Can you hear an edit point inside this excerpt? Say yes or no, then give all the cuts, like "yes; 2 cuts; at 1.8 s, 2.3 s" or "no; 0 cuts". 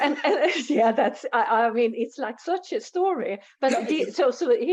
no; 0 cuts